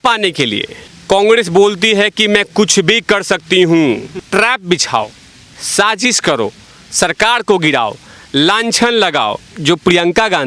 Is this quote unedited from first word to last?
no; 2 cuts; at 4.2 s, 9.5 s

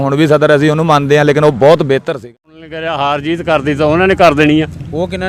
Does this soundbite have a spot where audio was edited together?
yes; 1 cut; at 2.2 s

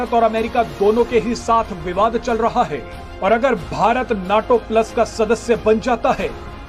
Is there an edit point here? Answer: no; 0 cuts

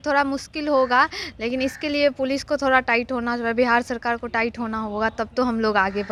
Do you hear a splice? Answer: no; 0 cuts

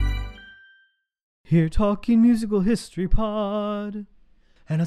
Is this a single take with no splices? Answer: no; 1 cut; at 1.3 s

